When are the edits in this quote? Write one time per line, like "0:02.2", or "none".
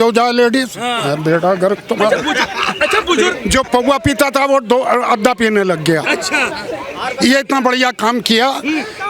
0:03.3